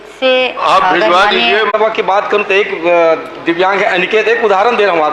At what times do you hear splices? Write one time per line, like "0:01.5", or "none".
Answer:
0:01.7